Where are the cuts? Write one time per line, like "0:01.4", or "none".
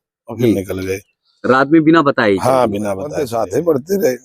0:03.2